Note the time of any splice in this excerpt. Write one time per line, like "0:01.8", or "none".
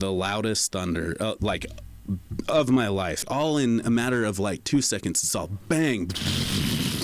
0:03.2